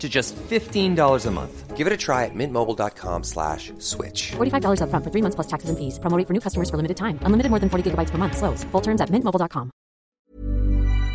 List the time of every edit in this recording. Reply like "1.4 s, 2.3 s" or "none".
10.0 s